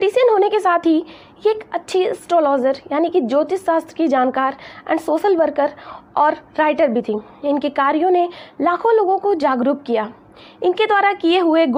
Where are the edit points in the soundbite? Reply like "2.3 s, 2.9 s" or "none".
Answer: none

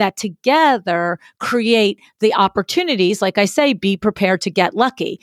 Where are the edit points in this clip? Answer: none

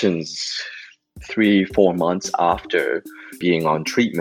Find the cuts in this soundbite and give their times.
1.2 s

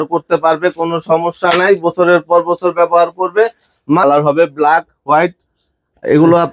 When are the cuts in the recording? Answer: 4.0 s

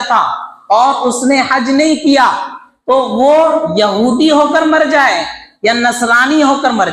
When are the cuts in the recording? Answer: none

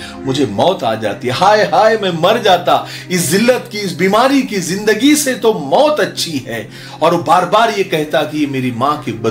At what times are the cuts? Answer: none

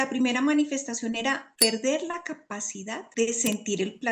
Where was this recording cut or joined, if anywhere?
1.5 s, 3.0 s

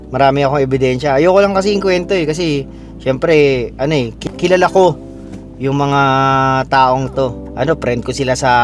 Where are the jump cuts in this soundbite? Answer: 4.2 s, 7.4 s

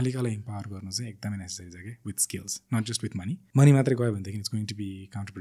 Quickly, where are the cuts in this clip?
3.4 s

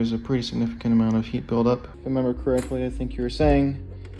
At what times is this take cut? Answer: 1.9 s

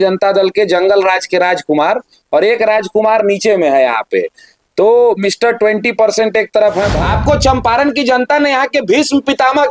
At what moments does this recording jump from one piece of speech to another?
6.9 s

